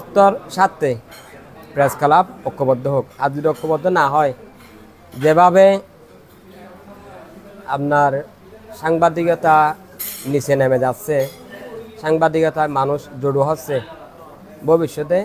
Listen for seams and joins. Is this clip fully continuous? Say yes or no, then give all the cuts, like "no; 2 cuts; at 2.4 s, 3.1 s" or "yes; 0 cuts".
yes; 0 cuts